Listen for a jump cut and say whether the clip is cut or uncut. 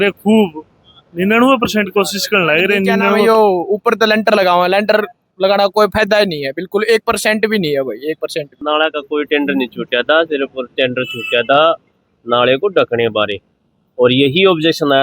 cut